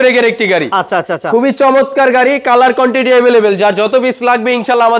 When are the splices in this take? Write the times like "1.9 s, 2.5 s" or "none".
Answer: none